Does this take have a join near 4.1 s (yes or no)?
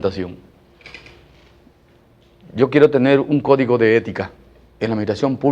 yes